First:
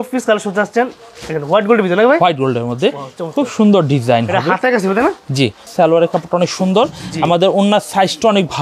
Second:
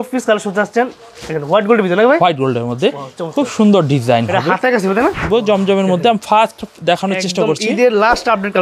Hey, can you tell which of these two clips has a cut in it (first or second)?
second